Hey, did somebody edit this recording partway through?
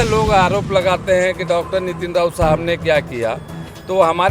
no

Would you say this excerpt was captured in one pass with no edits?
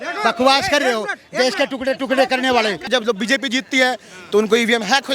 no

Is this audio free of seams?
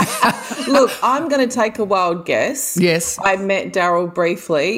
yes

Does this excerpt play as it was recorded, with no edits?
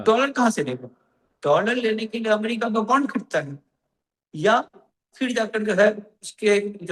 yes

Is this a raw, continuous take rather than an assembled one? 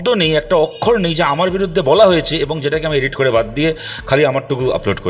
yes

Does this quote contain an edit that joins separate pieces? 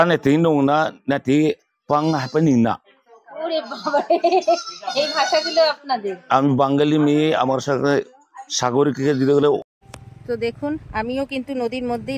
yes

